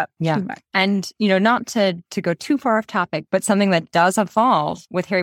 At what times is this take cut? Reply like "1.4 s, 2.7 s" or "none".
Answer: 3.2 s